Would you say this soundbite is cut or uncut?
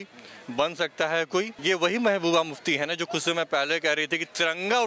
cut